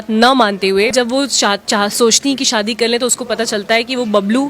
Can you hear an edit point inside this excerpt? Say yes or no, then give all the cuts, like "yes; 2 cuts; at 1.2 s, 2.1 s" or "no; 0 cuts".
yes; 1 cut; at 0.9 s